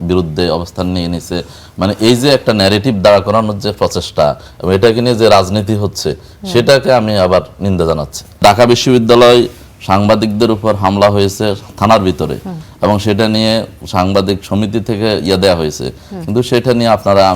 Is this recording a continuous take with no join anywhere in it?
no; 1 cut; at 8.4 s

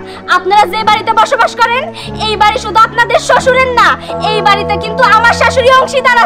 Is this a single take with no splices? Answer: yes; 0 cuts

